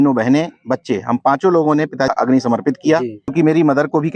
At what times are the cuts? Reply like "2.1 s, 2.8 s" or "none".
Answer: 2.1 s, 3.2 s